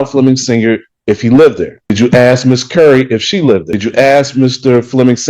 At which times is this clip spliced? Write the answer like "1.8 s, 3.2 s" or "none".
1.9 s, 3.8 s